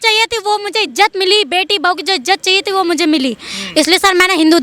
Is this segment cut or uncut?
uncut